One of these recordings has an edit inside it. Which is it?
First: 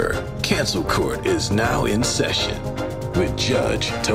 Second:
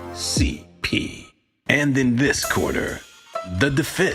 second; 1 cut; at 3.1 s

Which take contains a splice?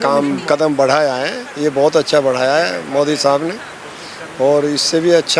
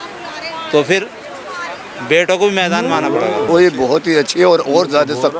second; 1 cut; at 3.3 s

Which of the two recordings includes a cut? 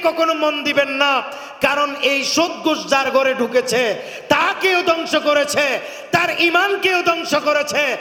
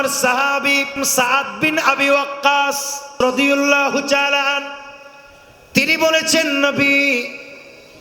second; 2 cuts; at 1.0 s, 3.1 s

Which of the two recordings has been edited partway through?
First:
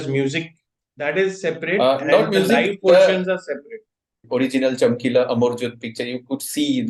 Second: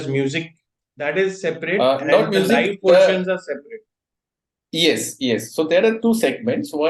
first; 1 cut; at 4.2 s

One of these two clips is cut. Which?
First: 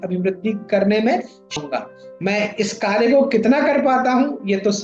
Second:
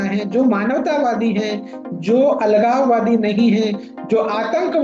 first; 1 cut; at 1.6 s

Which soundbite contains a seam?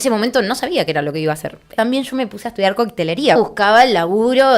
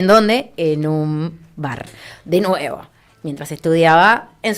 first; 2 cuts; at 1.7 s, 3.4 s

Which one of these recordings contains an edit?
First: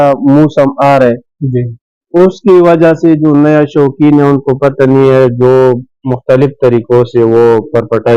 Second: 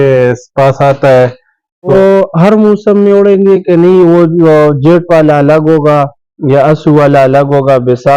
second; 1 cut; at 1.9 s

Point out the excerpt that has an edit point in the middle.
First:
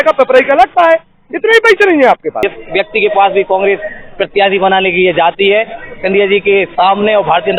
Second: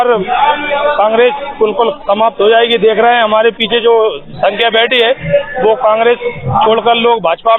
first; 1 cut; at 2.4 s

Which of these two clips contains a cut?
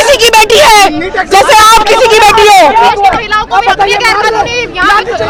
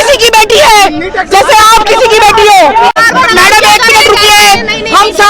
second; 1 cut; at 3.0 s

